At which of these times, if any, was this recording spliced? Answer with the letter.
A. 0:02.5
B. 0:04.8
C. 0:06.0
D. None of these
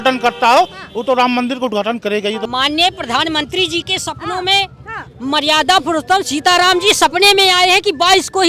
A